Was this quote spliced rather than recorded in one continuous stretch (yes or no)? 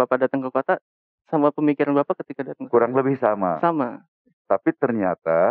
no